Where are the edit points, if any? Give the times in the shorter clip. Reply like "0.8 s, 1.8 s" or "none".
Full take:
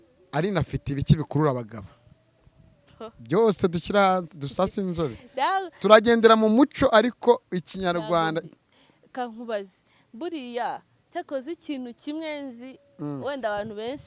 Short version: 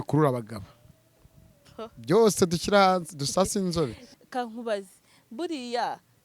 4.0 s